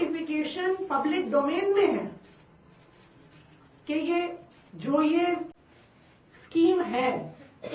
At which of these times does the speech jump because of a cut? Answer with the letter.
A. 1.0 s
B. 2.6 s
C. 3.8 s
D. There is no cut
D